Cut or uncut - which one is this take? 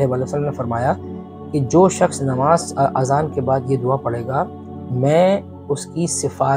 uncut